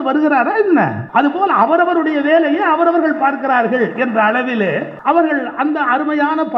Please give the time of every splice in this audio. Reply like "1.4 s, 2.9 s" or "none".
1.0 s, 4.9 s